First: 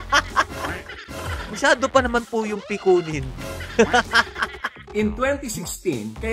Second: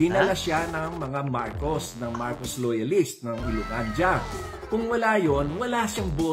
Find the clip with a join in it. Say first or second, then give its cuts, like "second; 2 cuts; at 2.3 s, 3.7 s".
first; 1 cut; at 4.8 s